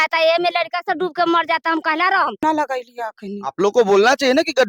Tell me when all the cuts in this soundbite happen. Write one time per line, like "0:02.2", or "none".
0:02.4